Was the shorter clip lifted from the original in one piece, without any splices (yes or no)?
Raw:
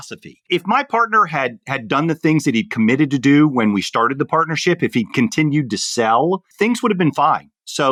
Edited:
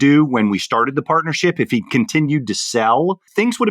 yes